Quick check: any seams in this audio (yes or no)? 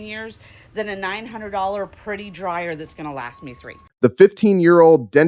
no